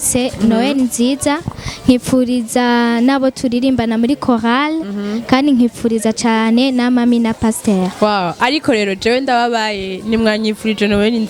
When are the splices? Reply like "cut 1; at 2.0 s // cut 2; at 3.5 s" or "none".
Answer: none

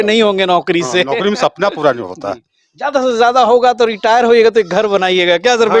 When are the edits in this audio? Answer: none

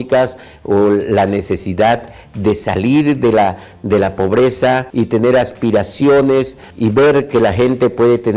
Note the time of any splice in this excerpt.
cut 1; at 4.9 s // cut 2; at 6.6 s

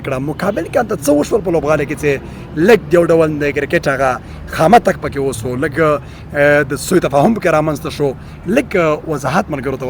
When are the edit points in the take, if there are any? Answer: none

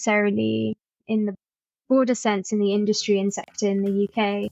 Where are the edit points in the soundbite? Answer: cut 1; at 1.0 s

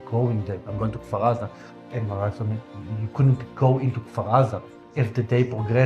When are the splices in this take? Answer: cut 1; at 2.8 s

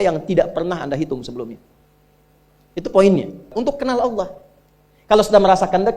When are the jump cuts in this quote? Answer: cut 1; at 3.5 s

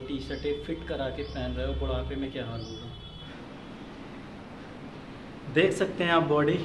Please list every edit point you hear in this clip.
cut 1; at 3.3 s

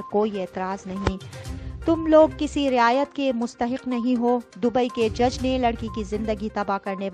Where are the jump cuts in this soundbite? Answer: cut 1; at 1.4 s

